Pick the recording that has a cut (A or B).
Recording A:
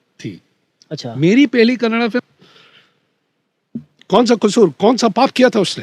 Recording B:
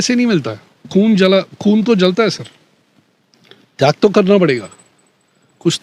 A